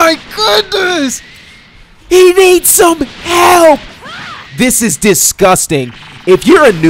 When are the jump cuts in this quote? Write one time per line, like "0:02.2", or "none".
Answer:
none